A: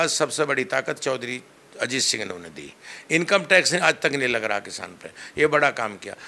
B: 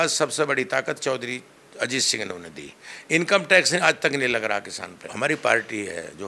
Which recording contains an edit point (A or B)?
B